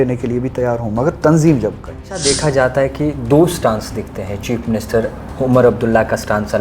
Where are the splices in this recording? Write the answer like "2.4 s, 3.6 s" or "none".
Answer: 2.2 s